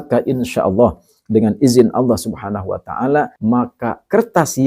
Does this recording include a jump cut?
yes; 1 cut; at 3.3 s

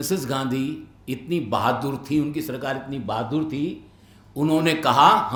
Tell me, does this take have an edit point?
no; 0 cuts

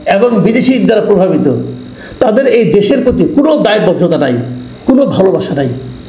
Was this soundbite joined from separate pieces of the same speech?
no; 0 cuts

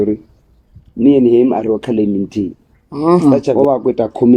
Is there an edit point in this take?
yes; 1 cut; at 3.2 s

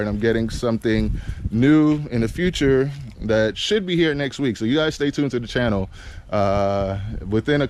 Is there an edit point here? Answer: no; 0 cuts

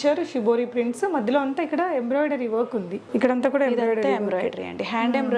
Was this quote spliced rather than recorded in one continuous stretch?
no; 0 cuts

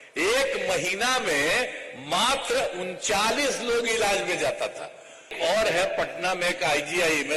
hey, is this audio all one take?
no; 1 cut; at 5.3 s

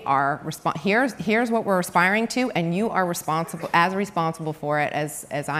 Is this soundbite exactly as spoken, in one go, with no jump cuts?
yes; 0 cuts

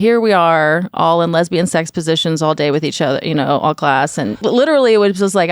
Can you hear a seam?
yes; 1 cut; at 4.4 s

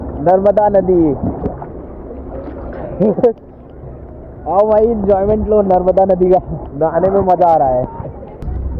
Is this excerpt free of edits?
yes; 0 cuts

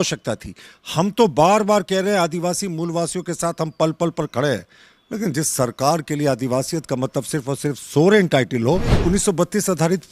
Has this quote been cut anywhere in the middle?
yes; 1 cut; at 9.0 s

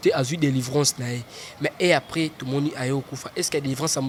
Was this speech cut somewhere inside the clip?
no; 0 cuts

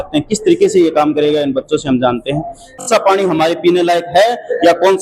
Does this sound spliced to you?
yes; 1 cut; at 2.8 s

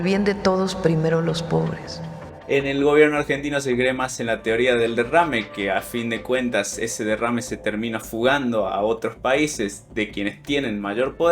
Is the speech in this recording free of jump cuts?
no; 1 cut; at 2.3 s

